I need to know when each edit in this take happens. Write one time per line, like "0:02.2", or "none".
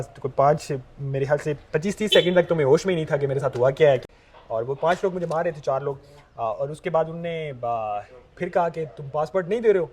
0:04.0